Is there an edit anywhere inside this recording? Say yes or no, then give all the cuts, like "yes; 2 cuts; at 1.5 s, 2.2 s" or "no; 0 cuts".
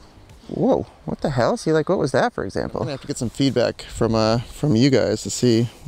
yes; 1 cut; at 3.1 s